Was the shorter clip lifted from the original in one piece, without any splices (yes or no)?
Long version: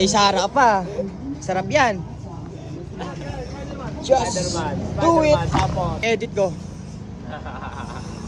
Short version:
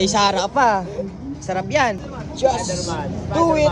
no